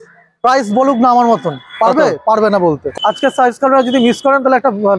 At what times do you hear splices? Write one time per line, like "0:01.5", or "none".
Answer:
0:02.9

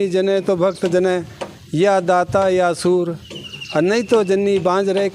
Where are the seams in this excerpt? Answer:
none

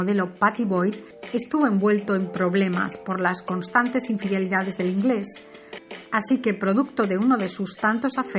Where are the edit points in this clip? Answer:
0:02.8

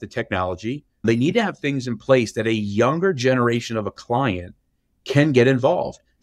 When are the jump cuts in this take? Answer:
0:01.0

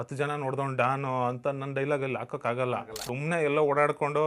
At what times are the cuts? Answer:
0:03.0

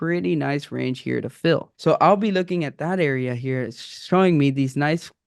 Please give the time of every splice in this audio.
0:01.7

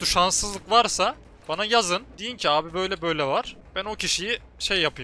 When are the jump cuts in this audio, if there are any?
0:01.3
0:02.2
0:03.6

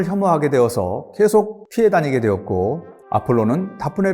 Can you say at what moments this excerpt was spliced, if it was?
0:01.6
0:02.9

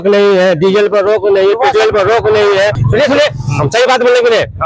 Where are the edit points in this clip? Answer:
none

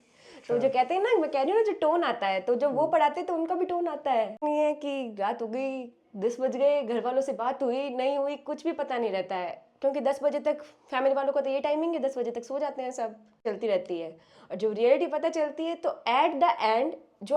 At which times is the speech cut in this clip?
0:04.4
0:13.4

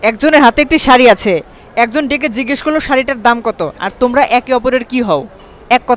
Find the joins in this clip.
none

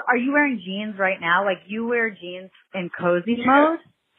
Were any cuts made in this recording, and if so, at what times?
none

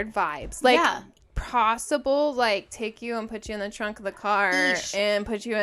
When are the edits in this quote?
none

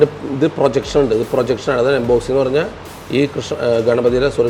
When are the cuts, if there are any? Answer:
none

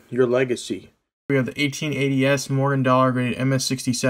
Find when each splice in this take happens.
0:01.3

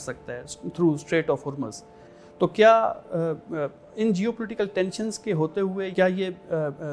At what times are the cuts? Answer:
0:02.0
0:05.9

